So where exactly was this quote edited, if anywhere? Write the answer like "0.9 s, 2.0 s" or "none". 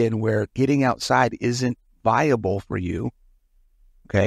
none